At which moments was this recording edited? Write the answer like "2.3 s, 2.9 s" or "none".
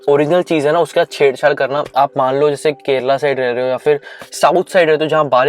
1.9 s